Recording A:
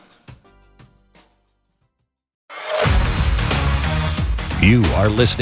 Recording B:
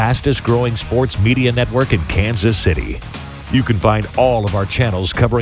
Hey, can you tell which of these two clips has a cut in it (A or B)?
A